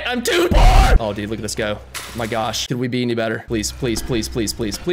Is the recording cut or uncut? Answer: cut